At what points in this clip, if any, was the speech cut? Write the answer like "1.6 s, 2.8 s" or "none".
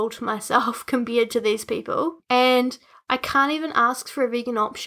2.2 s, 2.9 s